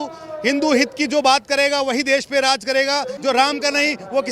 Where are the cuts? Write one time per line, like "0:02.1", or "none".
0:03.1